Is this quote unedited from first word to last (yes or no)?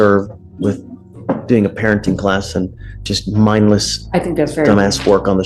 yes